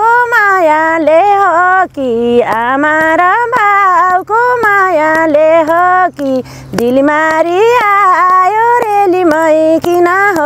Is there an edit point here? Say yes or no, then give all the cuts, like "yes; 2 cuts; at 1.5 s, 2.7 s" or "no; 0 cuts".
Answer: no; 0 cuts